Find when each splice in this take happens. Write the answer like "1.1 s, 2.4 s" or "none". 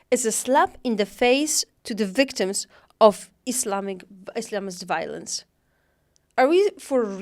none